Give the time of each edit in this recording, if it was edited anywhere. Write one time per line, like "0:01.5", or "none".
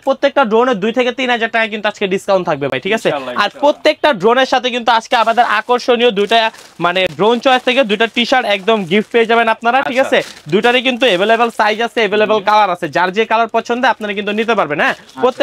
none

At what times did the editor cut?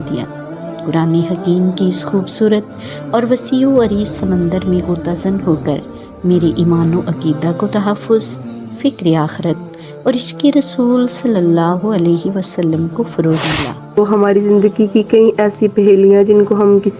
0:14.0

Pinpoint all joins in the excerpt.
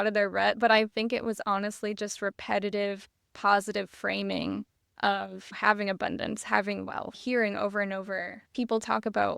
0:05.5
0:07.2
0:08.4

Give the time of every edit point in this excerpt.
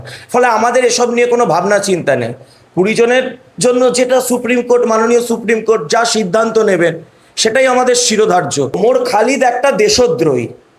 0:08.8

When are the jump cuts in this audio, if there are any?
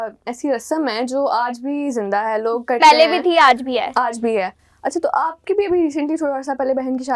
none

